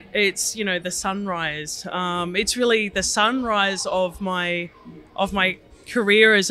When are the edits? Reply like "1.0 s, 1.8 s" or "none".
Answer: none